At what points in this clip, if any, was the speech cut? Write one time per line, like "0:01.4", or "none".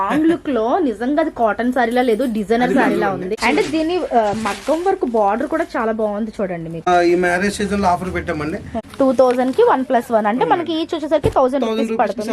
0:03.3
0:06.9
0:08.8

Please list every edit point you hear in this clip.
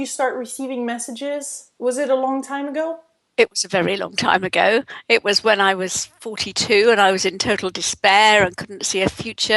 0:05.6

